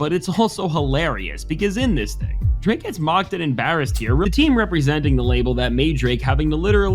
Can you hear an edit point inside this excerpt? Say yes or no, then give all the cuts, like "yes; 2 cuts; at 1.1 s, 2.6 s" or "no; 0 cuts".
yes; 1 cut; at 4.2 s